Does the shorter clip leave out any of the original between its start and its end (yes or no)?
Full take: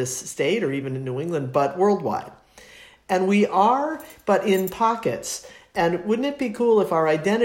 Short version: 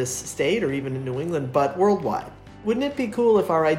yes